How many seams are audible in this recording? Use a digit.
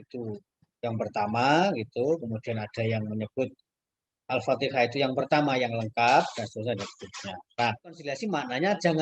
1